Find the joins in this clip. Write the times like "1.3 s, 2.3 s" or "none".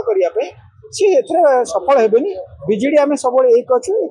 none